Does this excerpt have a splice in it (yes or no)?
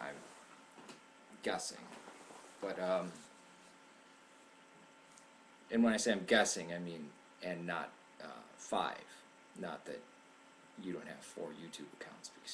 yes